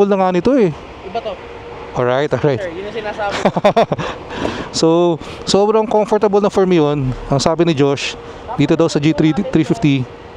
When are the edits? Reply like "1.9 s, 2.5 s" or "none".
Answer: none